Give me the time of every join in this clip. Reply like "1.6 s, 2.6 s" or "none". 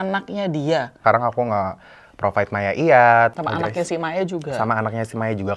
1.0 s, 3.3 s